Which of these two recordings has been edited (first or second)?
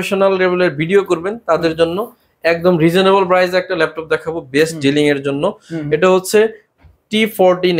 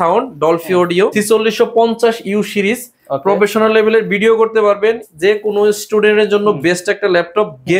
second